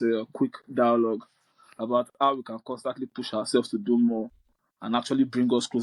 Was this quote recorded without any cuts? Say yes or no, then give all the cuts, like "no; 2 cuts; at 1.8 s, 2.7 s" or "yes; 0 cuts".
yes; 0 cuts